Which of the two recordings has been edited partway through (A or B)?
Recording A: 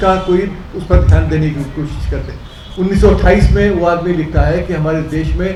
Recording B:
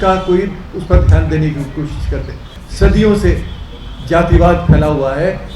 B